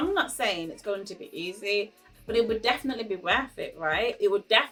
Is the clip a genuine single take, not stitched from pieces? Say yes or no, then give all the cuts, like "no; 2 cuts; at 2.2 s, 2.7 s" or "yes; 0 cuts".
yes; 0 cuts